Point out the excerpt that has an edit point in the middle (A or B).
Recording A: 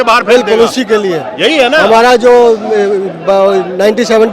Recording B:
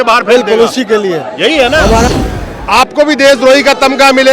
B